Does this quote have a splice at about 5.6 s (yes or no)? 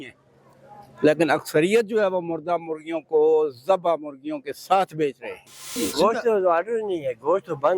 yes